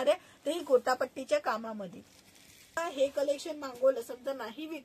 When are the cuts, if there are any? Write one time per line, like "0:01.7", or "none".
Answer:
0:02.8